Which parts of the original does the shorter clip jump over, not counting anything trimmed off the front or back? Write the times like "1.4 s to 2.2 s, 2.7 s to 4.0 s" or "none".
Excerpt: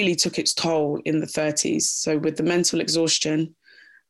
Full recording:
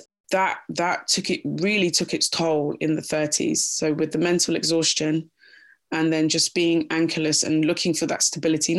none